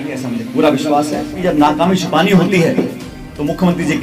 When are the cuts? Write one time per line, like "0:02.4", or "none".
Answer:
0:01.3